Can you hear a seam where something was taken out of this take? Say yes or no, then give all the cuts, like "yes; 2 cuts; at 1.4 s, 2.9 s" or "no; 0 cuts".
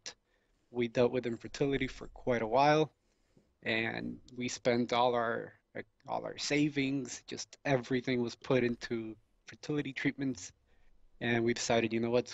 yes; 1 cut; at 8.6 s